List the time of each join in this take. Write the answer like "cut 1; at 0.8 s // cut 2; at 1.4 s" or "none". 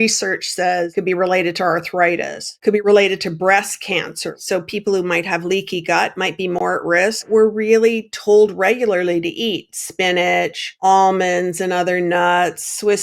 cut 1; at 0.9 s // cut 2; at 2.7 s // cut 3; at 4.4 s // cut 4; at 7.2 s // cut 5; at 10.6 s